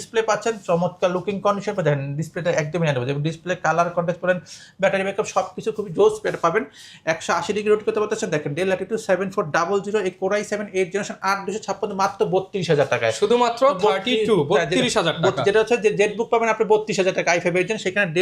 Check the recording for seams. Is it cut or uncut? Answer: uncut